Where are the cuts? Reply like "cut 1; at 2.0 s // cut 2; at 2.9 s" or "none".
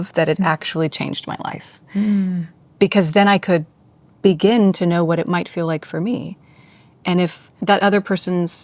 cut 1; at 7.6 s